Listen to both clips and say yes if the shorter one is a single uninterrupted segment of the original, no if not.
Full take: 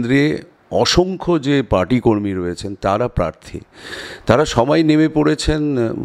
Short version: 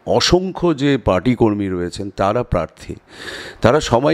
yes